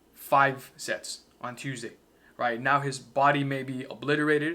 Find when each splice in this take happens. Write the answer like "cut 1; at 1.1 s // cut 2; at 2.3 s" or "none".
none